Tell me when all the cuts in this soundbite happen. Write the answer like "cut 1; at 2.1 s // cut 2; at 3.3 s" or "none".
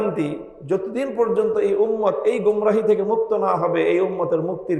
none